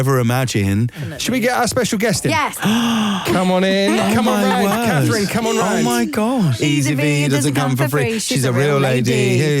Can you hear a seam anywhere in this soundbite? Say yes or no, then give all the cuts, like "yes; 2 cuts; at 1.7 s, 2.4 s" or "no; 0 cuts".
yes; 3 cuts; at 1.1 s, 2.5 s, 6.6 s